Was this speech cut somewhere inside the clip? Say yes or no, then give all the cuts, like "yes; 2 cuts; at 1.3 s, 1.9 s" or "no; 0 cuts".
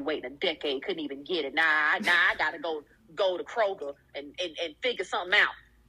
no; 0 cuts